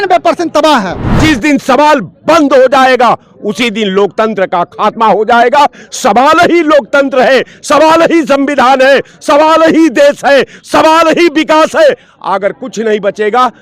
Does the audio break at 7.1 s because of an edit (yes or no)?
no